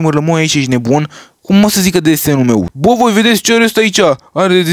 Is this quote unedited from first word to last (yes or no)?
no